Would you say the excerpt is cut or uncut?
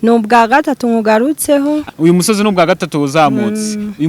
cut